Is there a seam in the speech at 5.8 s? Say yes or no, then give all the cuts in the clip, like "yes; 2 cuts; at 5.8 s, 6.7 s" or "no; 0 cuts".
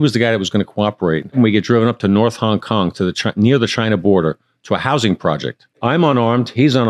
yes; 2 cuts; at 1.3 s, 5.8 s